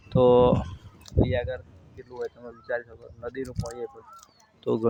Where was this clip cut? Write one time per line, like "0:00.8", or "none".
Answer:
none

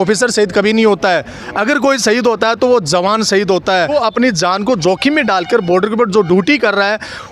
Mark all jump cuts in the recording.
0:03.9

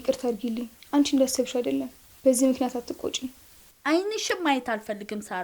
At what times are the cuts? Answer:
none

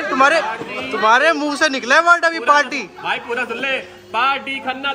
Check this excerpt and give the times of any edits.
none

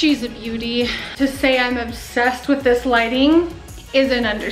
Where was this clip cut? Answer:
0:01.1

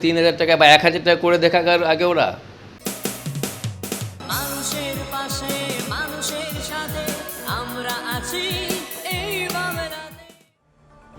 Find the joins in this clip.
0:02.7

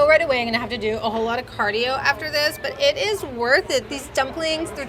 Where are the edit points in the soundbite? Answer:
none

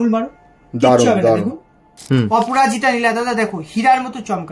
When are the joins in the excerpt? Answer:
0:02.0

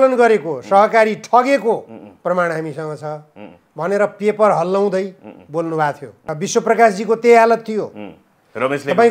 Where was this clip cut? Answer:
0:06.2

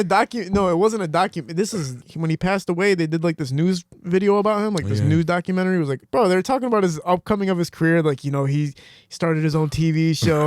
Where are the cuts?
0:02.0
0:06.0

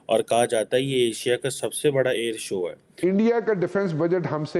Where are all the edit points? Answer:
0:02.9

